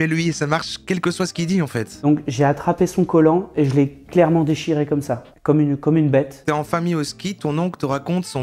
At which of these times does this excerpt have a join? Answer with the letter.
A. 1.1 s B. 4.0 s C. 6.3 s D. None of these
C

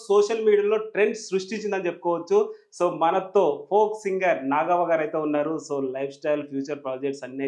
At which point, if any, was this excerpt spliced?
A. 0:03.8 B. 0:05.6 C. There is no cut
C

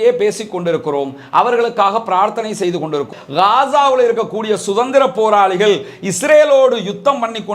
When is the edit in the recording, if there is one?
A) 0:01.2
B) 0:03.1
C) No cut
B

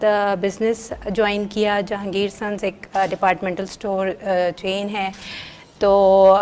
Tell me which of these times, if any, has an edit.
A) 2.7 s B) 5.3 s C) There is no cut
C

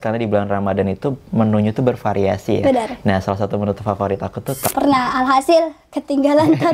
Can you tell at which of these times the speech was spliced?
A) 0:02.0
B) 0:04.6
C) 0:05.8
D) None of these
B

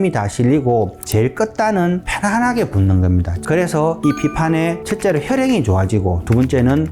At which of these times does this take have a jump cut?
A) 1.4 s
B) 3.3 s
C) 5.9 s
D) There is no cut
B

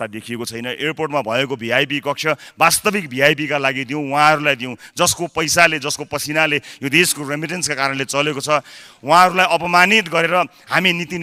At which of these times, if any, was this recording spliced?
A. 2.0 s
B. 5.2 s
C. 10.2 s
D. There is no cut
D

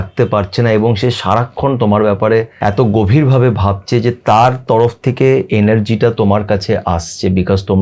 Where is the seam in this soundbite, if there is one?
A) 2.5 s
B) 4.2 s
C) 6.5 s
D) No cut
A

